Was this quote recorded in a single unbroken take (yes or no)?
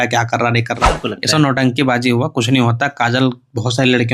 no